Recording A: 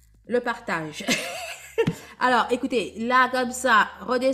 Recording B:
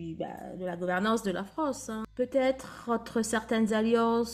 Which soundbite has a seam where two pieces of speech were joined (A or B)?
B